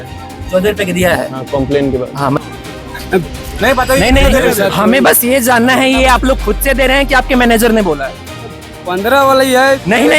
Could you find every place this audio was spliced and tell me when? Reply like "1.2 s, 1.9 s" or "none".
2.4 s

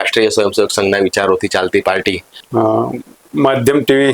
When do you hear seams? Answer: 2.3 s

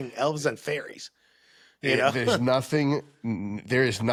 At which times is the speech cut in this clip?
none

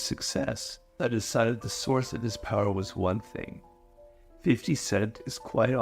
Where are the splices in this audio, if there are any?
1.0 s

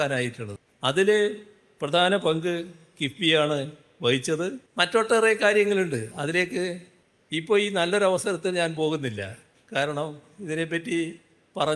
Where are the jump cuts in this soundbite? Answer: 4.6 s

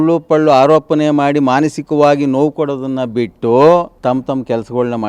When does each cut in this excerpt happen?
3.9 s

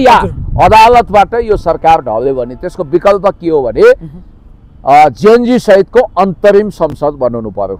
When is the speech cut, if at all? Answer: none

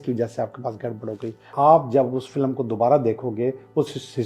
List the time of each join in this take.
1.5 s

